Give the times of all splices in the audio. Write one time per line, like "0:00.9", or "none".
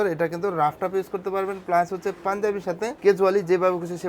none